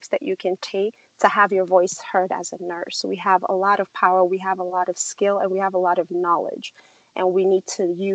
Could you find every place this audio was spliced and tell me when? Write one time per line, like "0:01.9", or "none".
0:01.0